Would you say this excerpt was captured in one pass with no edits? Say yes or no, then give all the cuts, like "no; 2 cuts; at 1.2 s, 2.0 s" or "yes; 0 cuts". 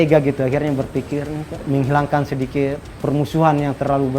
no; 2 cuts; at 1.6 s, 2.9 s